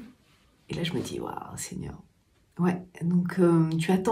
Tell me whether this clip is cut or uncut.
uncut